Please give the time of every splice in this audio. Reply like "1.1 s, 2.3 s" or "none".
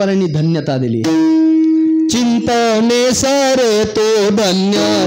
none